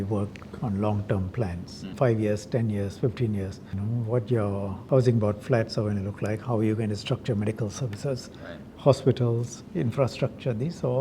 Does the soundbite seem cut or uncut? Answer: cut